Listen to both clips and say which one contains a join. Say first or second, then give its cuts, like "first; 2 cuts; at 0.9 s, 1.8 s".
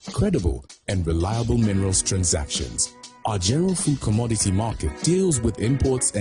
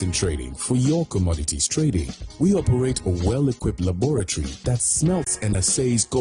second; 1 cut; at 2.2 s